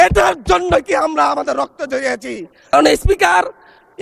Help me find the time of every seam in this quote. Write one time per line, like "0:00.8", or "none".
0:02.7